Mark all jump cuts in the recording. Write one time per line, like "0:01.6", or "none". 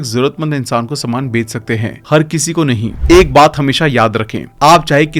0:02.9